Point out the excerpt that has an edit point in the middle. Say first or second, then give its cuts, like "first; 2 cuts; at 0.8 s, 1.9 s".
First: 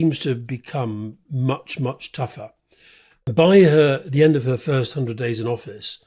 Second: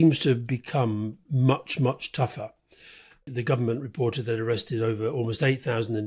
second; 1 cut; at 3.3 s